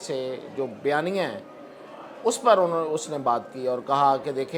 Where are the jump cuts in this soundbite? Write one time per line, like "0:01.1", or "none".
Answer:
none